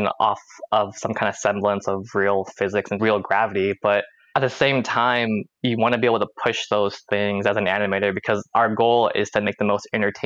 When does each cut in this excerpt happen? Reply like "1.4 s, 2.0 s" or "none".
3.0 s, 4.2 s